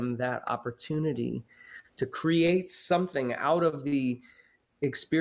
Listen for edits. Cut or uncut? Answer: uncut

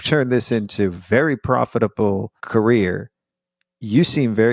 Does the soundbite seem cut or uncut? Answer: uncut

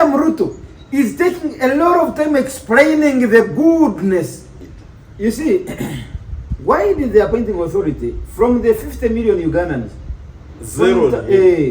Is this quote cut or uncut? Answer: cut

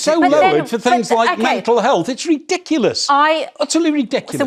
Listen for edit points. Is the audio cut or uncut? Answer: uncut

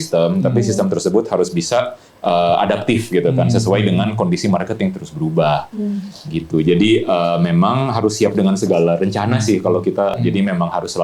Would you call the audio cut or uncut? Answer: cut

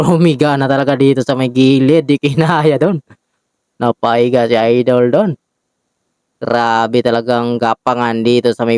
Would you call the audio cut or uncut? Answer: uncut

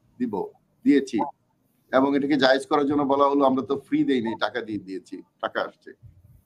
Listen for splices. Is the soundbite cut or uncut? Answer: uncut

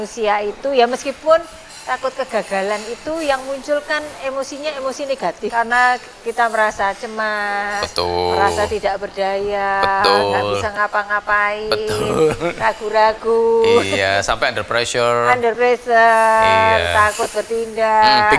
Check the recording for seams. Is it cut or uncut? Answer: cut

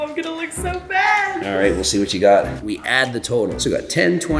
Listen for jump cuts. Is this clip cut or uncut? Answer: cut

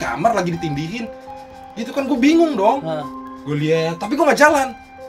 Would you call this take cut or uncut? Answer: uncut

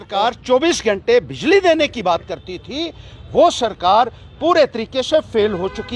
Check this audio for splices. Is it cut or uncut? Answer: uncut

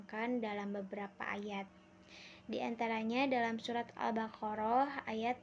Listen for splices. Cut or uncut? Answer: cut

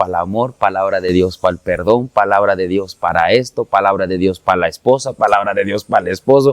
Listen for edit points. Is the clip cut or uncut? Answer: uncut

